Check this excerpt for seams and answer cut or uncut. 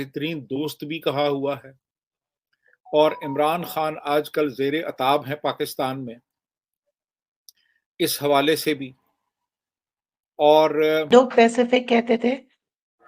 cut